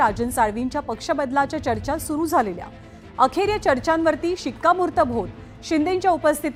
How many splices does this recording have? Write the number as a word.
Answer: zero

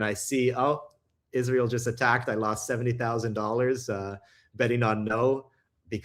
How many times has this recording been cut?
zero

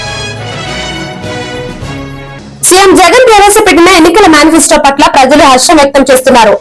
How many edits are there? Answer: one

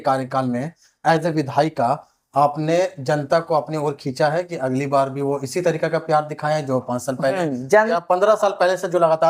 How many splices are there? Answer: zero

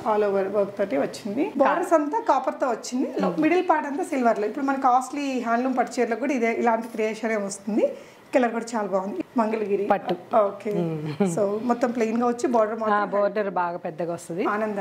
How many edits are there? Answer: two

